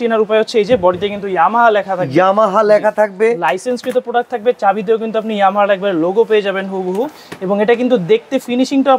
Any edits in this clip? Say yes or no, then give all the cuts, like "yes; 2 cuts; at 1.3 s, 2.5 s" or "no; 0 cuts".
no; 0 cuts